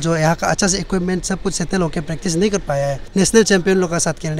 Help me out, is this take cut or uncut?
cut